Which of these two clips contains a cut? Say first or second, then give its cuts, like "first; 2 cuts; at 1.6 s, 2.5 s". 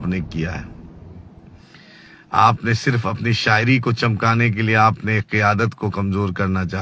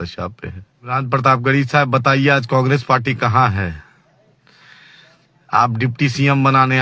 second; 1 cut; at 0.9 s